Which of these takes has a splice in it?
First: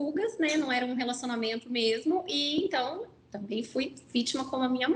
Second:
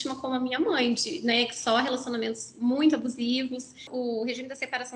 second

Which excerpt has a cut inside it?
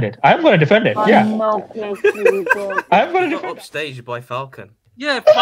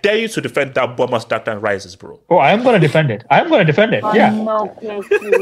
first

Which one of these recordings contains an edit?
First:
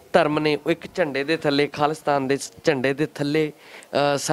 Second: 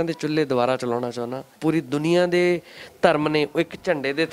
second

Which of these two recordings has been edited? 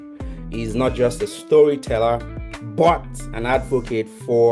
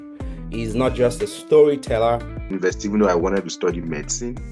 second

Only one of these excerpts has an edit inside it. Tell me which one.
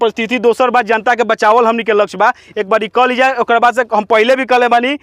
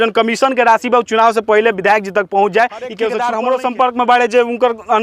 second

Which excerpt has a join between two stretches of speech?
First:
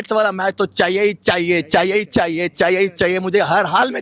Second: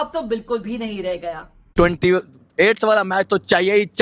second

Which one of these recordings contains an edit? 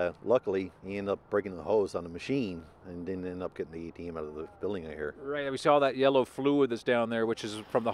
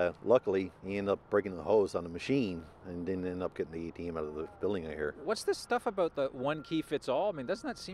second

